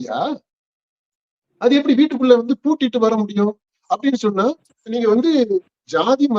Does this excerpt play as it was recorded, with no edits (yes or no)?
yes